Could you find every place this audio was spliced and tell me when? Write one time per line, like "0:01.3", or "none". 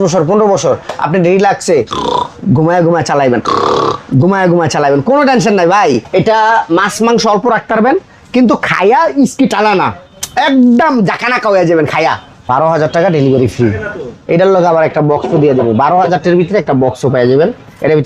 0:06.0
0:12.4